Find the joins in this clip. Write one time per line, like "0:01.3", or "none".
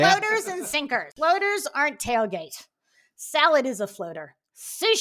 0:01.1